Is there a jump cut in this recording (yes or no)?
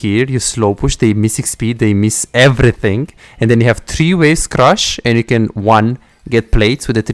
no